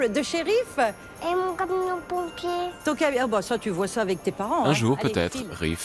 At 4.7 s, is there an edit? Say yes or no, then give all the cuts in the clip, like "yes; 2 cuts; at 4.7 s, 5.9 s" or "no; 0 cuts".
yes; 1 cut; at 4.7 s